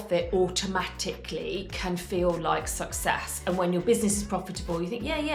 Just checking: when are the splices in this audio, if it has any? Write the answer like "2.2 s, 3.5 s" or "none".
none